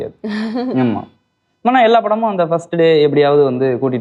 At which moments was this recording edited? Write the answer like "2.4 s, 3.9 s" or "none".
none